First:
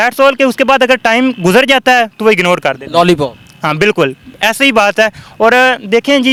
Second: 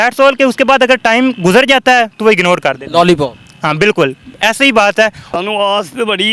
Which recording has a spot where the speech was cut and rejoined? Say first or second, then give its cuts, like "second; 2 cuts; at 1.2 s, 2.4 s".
second; 1 cut; at 5.2 s